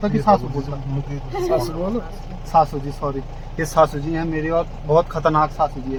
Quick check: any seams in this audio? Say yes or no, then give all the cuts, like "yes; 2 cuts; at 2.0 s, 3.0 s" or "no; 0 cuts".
no; 0 cuts